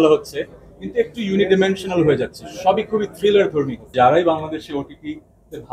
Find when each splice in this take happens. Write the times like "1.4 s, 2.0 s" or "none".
3.9 s